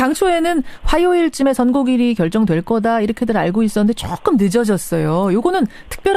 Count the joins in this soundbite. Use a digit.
1